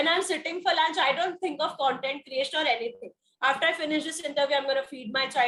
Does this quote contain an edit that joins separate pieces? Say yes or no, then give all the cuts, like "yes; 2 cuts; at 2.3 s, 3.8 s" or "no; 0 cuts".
no; 0 cuts